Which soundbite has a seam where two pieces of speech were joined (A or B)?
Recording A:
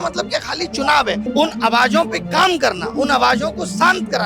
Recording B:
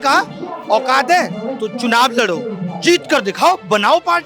A